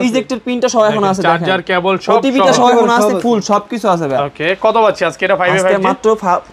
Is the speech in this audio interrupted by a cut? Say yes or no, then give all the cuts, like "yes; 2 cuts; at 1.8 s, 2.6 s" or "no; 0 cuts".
no; 0 cuts